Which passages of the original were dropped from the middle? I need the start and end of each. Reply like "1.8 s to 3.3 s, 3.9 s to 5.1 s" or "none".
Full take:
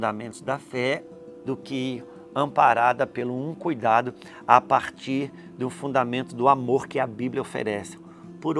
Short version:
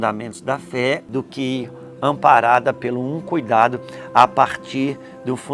1.1 s to 1.4 s